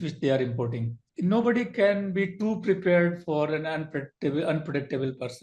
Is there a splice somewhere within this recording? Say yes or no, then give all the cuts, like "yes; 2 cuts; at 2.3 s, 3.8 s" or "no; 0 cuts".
yes; 1 cut; at 1.0 s